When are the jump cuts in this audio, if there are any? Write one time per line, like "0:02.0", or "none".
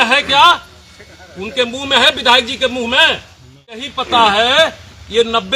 0:04.0

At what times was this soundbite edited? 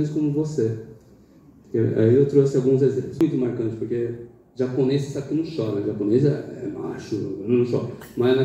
0:03.2

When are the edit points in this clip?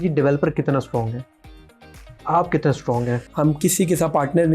0:03.3

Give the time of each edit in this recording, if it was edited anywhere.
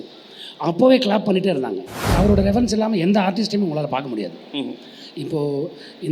0:02.1

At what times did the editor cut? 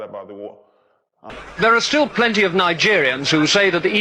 0:01.2

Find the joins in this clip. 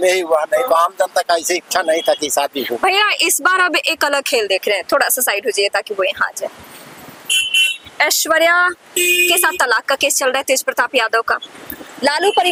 none

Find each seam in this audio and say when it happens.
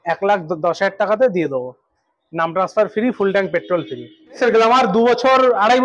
0:04.4

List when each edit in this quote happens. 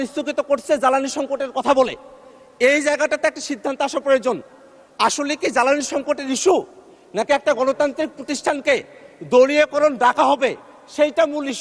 none

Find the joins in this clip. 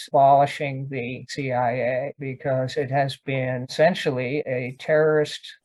none

